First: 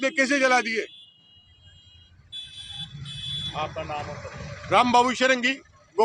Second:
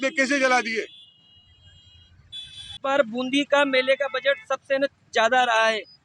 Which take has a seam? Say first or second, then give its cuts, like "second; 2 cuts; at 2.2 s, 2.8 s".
second; 1 cut; at 2.8 s